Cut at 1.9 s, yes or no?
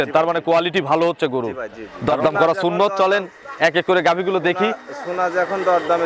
yes